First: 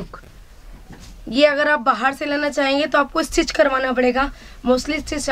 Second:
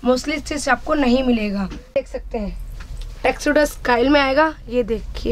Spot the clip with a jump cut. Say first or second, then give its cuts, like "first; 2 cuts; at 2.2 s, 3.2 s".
second; 1 cut; at 1.9 s